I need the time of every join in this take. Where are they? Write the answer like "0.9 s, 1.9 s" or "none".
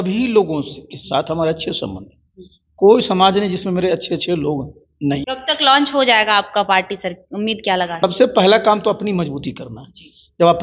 5.3 s, 8.0 s